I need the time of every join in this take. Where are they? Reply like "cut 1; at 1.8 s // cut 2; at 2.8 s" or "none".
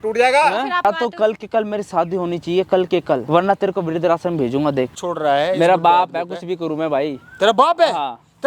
cut 1; at 0.8 s // cut 2; at 3.2 s // cut 3; at 5.0 s